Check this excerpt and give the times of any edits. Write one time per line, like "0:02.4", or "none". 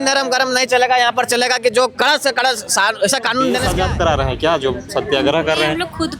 0:03.7

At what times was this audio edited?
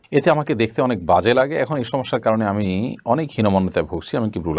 none

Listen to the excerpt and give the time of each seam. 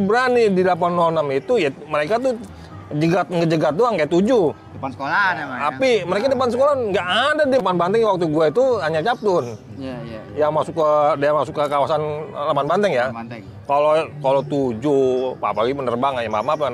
0:07.6

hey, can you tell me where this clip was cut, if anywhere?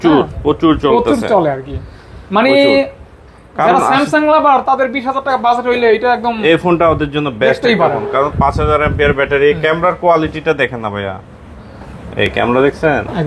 none

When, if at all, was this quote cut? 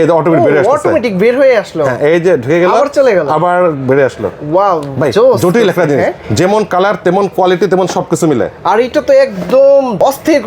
none

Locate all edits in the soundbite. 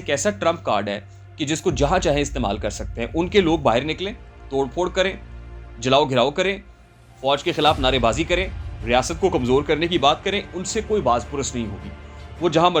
none

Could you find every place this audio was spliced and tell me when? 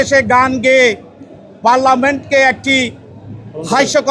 none

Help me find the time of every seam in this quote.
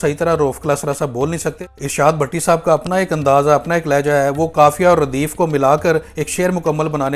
0:01.8

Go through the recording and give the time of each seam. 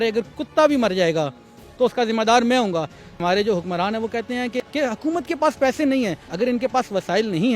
0:03.2
0:04.6
0:06.2

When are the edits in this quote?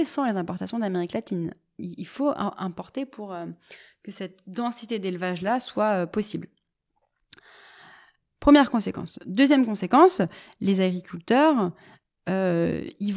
none

